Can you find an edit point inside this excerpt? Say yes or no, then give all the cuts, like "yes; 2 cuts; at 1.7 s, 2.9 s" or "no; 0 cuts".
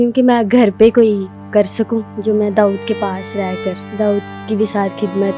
yes; 2 cuts; at 2.1 s, 3.8 s